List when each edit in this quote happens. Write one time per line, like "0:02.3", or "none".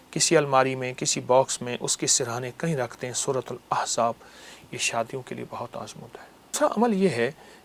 0:06.6